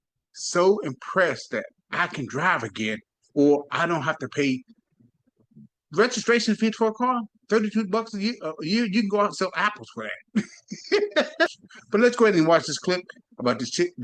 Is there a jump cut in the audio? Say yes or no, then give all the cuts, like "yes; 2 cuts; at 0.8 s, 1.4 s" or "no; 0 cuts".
yes; 2 cuts; at 5.1 s, 11.5 s